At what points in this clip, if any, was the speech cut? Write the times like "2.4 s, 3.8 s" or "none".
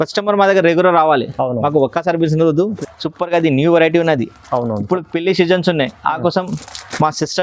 2.8 s